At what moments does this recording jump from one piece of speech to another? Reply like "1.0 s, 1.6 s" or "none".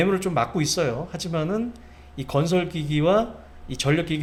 none